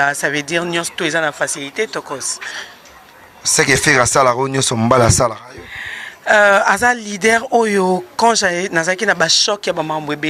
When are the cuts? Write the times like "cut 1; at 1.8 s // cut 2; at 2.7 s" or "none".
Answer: none